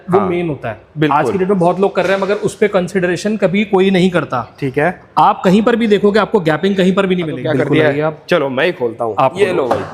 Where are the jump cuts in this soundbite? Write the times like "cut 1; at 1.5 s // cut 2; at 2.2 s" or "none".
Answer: cut 1; at 7.4 s